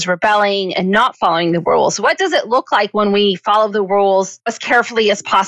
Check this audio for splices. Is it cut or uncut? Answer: cut